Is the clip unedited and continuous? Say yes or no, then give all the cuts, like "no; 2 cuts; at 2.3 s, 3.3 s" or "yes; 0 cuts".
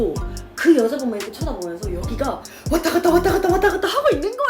yes; 0 cuts